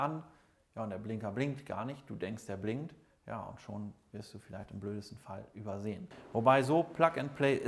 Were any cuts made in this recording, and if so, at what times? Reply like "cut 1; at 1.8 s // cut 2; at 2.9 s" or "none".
cut 1; at 6.1 s